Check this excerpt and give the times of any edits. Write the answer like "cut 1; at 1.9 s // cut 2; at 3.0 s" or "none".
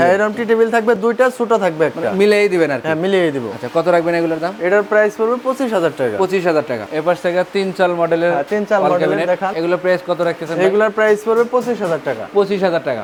none